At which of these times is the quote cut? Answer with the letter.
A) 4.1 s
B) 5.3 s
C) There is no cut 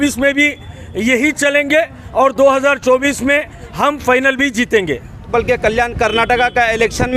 B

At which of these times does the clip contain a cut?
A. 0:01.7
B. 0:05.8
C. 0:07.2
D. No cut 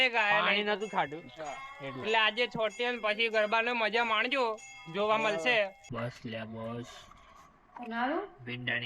B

